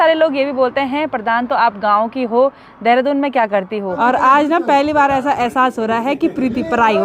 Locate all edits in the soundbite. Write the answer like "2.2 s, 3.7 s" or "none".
3.9 s